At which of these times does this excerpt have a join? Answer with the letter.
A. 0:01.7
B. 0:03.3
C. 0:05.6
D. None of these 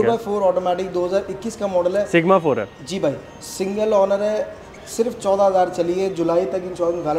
D